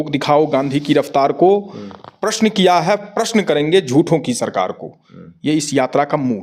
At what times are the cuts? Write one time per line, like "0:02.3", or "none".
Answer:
none

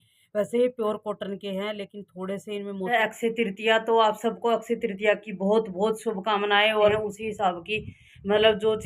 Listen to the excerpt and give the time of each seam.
0:02.9
0:06.9

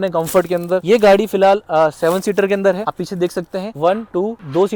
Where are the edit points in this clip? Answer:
none

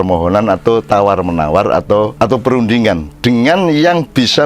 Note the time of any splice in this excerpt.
0:02.1

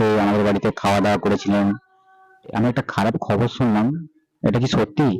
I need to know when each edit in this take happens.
0:02.5

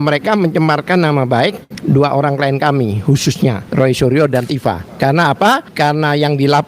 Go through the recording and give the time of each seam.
0:01.7
0:03.6
0:04.9
0:05.7

